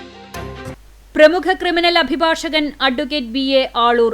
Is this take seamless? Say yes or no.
no